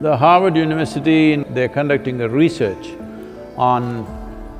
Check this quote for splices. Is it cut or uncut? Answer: cut